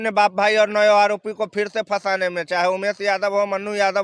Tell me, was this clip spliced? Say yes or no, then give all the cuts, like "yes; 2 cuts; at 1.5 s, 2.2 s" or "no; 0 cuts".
no; 0 cuts